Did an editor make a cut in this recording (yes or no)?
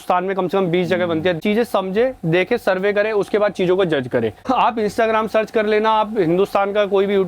yes